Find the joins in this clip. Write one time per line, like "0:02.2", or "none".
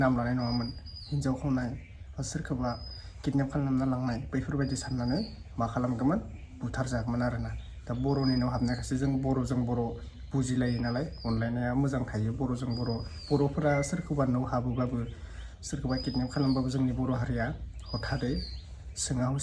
none